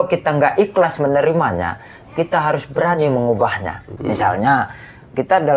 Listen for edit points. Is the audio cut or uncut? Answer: cut